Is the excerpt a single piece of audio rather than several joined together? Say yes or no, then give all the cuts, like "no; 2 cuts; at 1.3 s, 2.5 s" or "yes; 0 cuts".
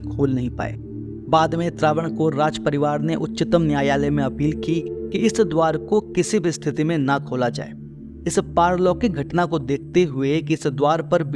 yes; 0 cuts